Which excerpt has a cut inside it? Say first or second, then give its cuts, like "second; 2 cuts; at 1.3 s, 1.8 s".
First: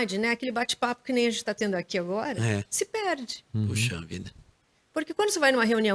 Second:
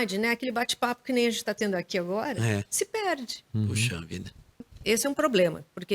second; 1 cut; at 4.7 s